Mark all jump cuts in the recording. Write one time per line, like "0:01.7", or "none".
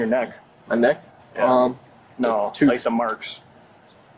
none